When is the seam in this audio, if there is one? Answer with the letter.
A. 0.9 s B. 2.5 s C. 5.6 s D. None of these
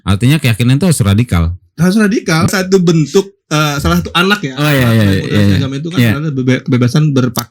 B